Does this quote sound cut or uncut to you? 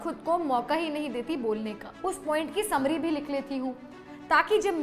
cut